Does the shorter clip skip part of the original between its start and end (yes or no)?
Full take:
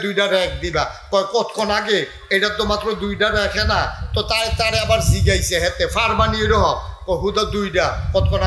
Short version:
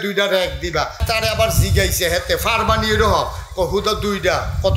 yes